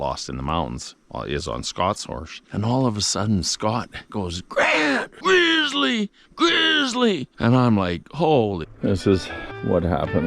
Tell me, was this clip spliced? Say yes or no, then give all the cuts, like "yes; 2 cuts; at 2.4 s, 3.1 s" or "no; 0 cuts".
yes; 4 cuts; at 4.1 s, 5.1 s, 7.3 s, 8.7 s